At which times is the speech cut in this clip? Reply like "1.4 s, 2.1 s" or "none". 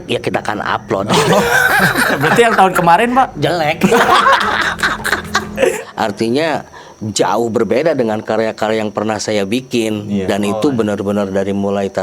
5.7 s